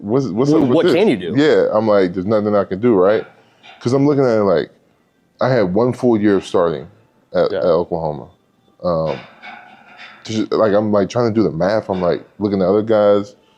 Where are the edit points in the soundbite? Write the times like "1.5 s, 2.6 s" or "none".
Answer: none